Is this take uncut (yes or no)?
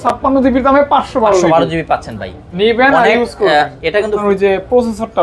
no